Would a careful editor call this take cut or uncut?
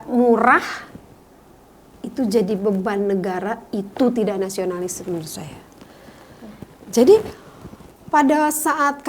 uncut